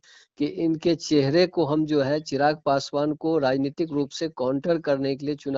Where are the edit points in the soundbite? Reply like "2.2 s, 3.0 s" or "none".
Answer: none